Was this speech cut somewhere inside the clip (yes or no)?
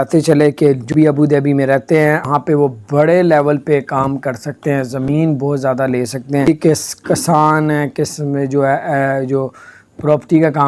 yes